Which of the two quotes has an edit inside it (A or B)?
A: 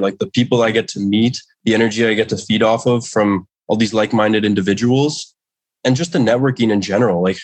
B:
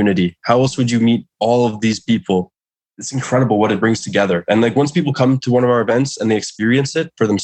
B